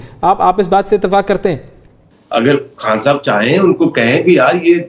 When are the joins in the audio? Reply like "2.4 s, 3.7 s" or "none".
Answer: 2.0 s

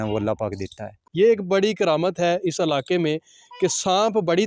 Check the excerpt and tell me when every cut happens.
0.9 s

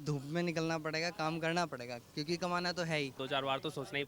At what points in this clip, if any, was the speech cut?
3.2 s

